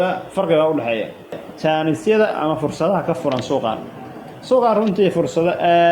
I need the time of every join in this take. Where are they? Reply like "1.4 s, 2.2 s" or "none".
1.5 s